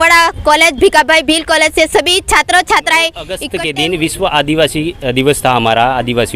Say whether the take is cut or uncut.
cut